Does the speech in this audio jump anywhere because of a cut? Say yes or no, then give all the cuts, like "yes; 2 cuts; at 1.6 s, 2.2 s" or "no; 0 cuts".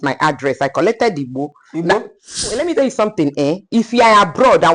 yes; 1 cut; at 2.6 s